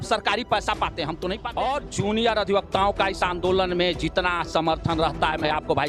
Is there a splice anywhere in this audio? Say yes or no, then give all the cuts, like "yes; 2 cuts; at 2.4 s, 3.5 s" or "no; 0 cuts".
yes; 1 cut; at 1.4 s